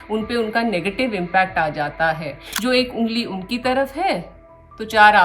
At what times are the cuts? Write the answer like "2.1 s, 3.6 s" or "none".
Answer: 2.5 s